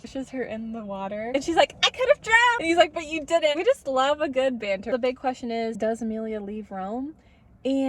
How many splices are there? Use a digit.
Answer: 2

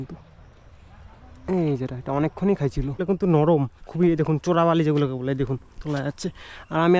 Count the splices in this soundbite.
1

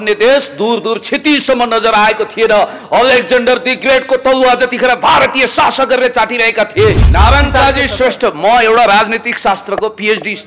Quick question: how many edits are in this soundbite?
1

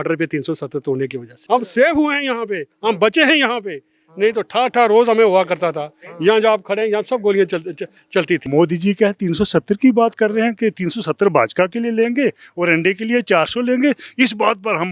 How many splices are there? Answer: 2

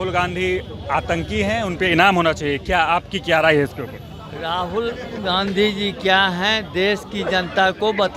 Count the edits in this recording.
0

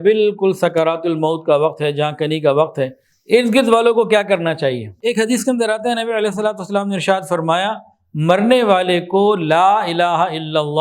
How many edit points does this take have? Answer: 1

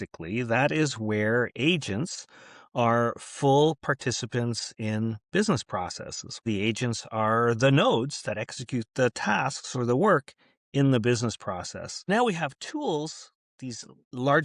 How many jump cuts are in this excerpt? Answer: 2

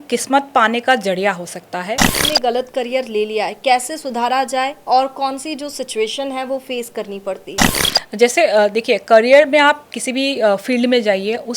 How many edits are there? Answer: 1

